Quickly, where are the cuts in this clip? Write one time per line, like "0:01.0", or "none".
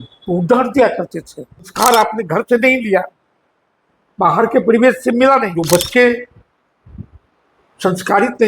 0:01.7
0:05.6